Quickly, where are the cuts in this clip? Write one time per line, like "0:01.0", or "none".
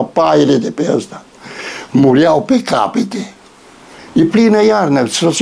0:04.0